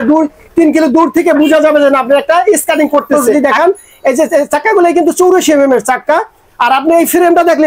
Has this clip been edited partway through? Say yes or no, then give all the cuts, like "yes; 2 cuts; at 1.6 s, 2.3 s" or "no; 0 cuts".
yes; 1 cut; at 3.3 s